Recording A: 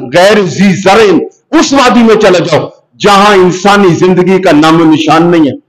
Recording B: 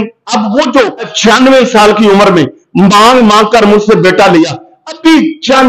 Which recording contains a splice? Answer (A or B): B